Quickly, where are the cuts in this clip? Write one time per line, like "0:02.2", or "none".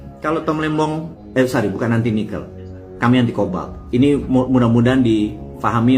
0:01.2